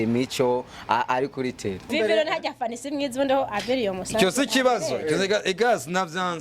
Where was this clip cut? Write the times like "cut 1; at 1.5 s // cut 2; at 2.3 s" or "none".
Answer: cut 1; at 1.9 s